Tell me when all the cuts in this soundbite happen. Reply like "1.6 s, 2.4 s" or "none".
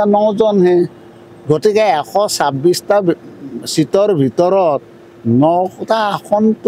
none